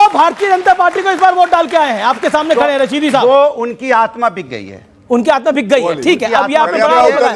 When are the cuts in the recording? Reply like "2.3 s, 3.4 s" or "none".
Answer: 4.9 s